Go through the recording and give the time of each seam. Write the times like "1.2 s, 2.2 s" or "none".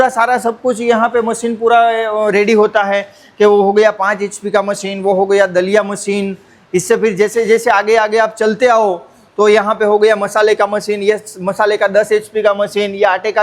none